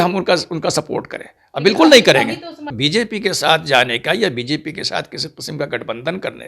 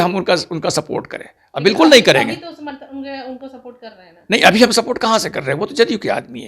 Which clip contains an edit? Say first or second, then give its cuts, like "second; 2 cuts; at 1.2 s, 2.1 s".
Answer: first; 1 cut; at 2.7 s